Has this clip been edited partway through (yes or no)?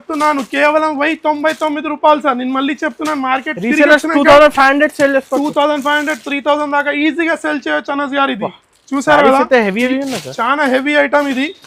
no